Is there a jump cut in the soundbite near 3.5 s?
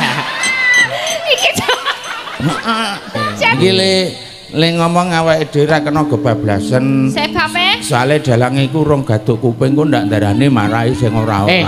yes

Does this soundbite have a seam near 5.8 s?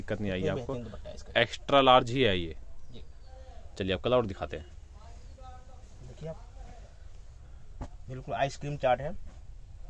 no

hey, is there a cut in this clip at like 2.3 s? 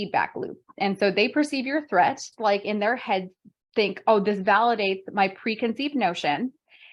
yes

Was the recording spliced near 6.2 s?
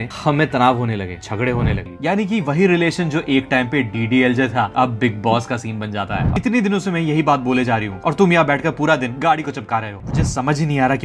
yes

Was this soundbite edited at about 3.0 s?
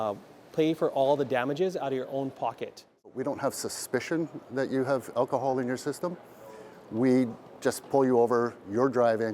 yes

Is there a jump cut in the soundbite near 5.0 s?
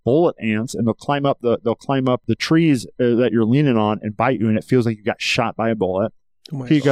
no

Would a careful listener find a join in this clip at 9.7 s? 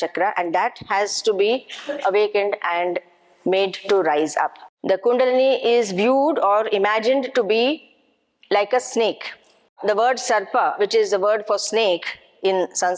yes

